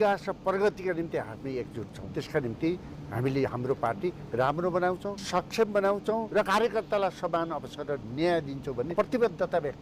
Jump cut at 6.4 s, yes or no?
yes